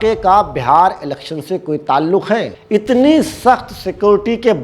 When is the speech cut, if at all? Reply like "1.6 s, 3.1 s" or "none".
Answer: 2.6 s